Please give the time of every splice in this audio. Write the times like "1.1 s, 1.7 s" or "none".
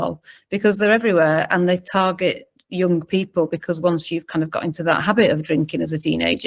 none